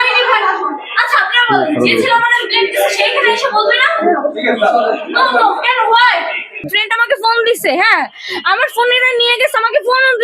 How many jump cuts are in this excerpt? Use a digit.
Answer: 1